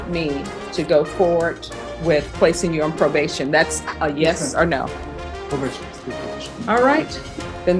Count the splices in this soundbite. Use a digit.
0